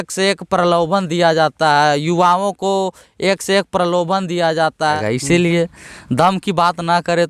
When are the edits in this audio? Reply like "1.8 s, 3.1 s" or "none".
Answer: 5.0 s